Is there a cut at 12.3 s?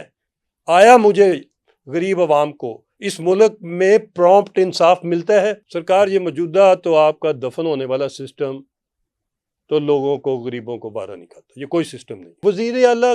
yes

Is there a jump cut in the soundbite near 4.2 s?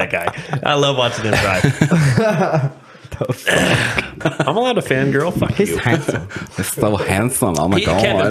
yes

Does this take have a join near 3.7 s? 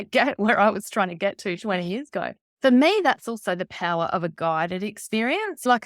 no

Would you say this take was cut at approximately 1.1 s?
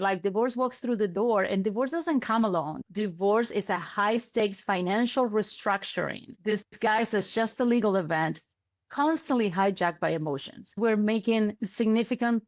no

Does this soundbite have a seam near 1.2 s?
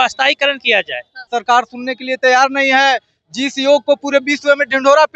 yes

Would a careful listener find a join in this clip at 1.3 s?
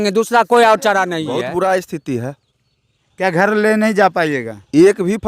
yes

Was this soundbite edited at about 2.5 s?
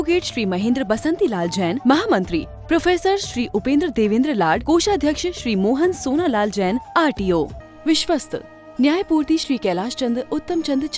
no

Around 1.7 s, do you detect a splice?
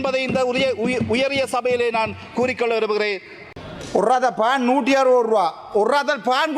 no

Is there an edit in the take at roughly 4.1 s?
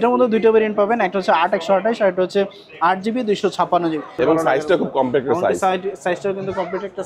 yes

